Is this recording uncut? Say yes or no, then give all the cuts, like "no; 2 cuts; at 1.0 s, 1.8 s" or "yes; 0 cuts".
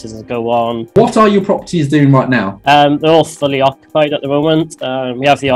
no; 2 cuts; at 1.0 s, 2.5 s